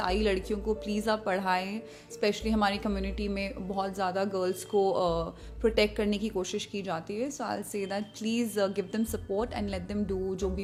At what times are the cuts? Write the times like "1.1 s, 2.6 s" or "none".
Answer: none